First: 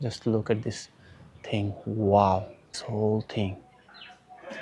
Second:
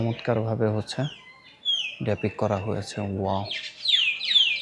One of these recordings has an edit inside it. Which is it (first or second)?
first